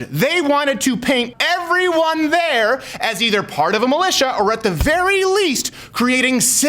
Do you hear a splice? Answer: yes; 1 cut; at 1.3 s

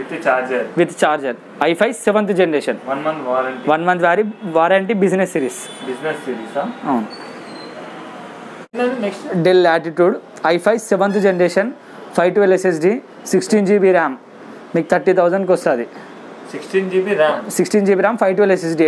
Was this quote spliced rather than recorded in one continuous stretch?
no; 0 cuts

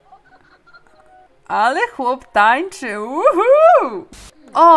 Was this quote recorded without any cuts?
yes; 0 cuts

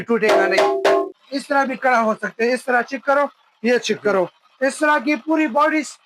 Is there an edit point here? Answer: yes; 1 cut; at 1.1 s

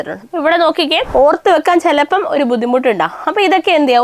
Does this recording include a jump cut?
yes; 1 cut; at 1.0 s

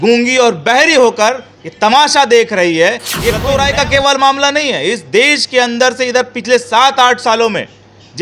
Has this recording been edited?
yes; 1 cut; at 3.4 s

